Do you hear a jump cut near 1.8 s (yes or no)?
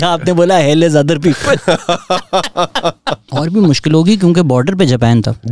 no